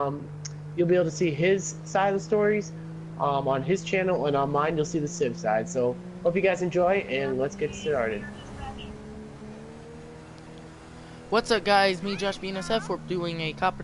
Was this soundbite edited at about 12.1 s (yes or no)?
yes